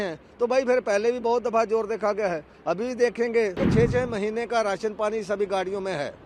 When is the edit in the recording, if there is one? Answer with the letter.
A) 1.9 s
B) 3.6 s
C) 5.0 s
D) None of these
B